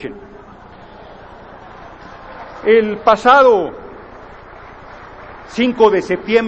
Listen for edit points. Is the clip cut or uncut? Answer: cut